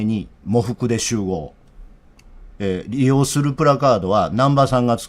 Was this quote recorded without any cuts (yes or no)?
yes